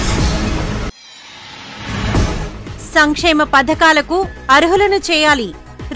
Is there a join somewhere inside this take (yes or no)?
yes